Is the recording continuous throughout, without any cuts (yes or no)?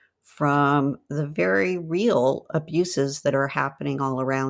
yes